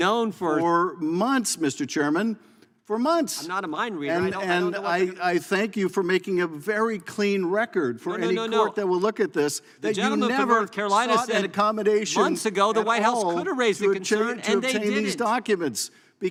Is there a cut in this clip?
no; 0 cuts

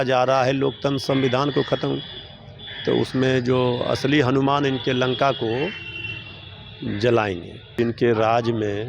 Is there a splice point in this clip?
yes; 1 cut; at 7.7 s

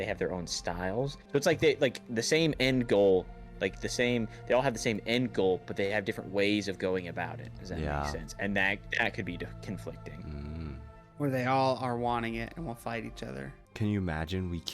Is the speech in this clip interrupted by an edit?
yes; 3 cuts; at 1.2 s, 11.0 s, 13.6 s

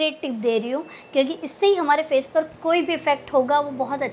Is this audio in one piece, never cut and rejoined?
yes; 0 cuts

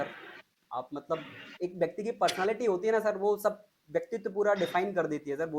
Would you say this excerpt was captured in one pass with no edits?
yes; 0 cuts

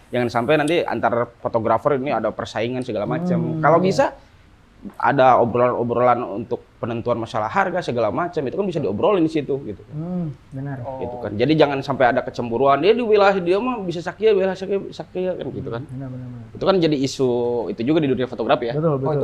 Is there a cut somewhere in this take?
no; 0 cuts

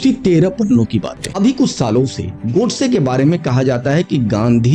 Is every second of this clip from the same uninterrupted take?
no; 1 cut; at 1.2 s

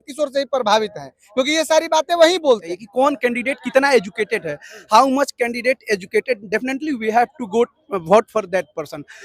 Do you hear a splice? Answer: yes; 1 cut; at 2.8 s

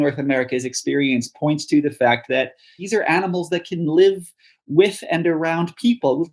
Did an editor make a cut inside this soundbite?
yes; 1 cut; at 2.8 s

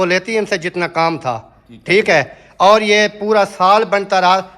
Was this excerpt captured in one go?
yes; 0 cuts

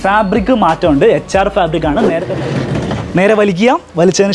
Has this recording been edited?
yes; 1 cut; at 2.1 s

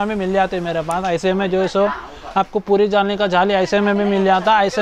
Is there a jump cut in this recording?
no; 0 cuts

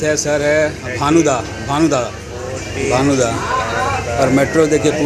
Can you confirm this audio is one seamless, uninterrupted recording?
yes; 0 cuts

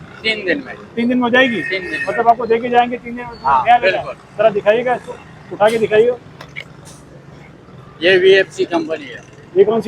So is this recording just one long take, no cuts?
yes; 0 cuts

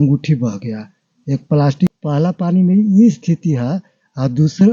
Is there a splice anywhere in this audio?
yes; 1 cut; at 1.9 s

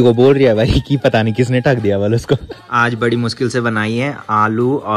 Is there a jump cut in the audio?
yes; 1 cut; at 2.7 s

